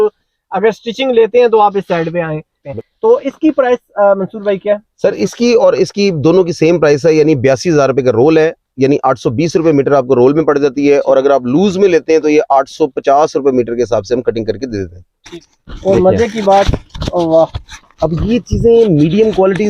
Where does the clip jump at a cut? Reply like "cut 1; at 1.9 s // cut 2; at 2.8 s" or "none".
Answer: cut 1; at 2.6 s // cut 2; at 15.4 s